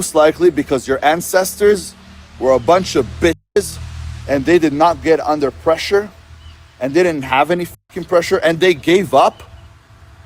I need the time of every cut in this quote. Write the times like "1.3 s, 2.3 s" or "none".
none